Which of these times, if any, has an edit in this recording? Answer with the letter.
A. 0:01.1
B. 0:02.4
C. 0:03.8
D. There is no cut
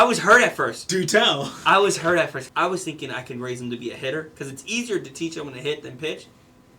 B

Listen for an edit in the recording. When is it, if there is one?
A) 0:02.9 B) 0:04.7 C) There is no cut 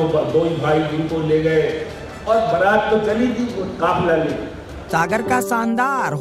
B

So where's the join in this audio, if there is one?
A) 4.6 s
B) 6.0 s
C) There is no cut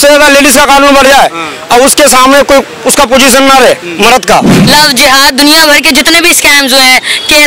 A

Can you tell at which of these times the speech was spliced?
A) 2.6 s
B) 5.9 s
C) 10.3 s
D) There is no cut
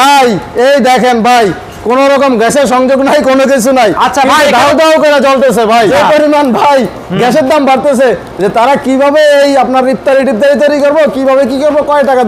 B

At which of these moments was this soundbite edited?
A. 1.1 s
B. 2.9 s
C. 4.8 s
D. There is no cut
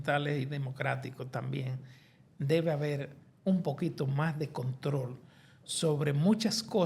D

